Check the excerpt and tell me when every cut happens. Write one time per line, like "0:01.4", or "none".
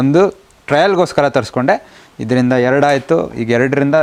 none